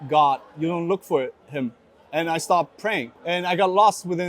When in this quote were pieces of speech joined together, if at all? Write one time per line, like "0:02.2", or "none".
0:03.1